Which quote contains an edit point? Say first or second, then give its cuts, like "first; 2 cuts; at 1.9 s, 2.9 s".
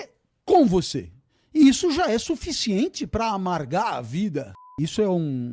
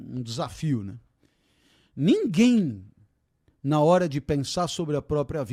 first; 1 cut; at 4.6 s